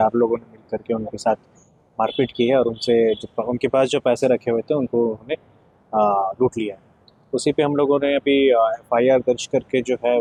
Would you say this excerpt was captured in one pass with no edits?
yes; 0 cuts

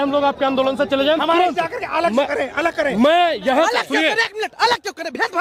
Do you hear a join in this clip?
no; 0 cuts

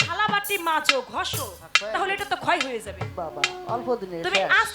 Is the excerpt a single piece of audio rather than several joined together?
yes; 0 cuts

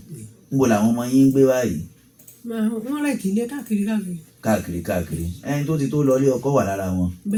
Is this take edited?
no; 0 cuts

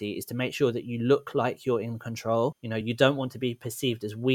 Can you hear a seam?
no; 0 cuts

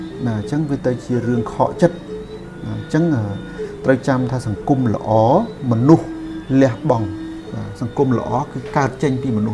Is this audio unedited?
yes; 0 cuts

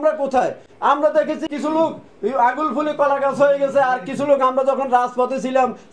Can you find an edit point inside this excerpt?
yes; 1 cut; at 1.5 s

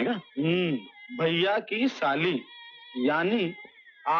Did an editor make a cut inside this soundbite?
no; 0 cuts

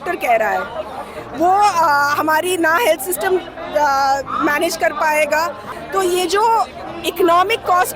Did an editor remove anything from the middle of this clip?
yes; 1 cut; at 5.7 s

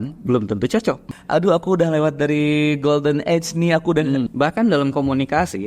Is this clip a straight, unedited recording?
no; 2 cuts; at 1.1 s, 4.3 s

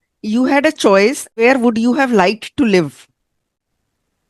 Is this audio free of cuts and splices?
yes; 0 cuts

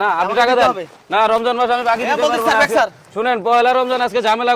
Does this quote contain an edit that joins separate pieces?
no; 0 cuts

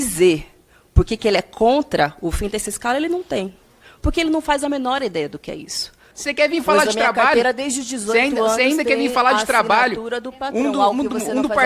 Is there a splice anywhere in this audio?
yes; 1 cut; at 6.2 s

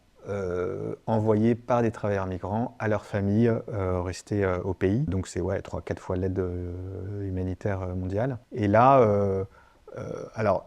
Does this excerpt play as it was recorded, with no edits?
no; 2 cuts; at 5.1 s, 8.4 s

